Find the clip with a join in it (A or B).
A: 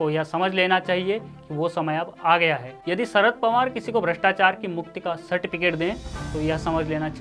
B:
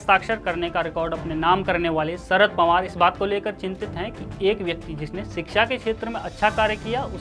A